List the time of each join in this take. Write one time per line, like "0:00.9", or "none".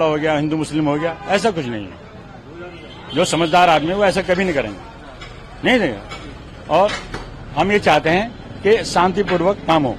none